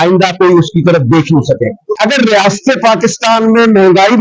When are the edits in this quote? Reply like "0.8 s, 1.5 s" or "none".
2.0 s